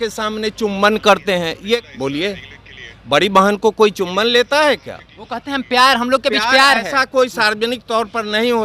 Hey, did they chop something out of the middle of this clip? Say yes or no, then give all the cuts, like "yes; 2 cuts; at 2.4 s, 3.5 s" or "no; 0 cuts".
no; 0 cuts